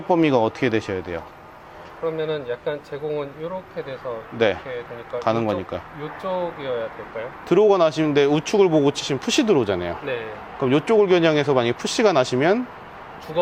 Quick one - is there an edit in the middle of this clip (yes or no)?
no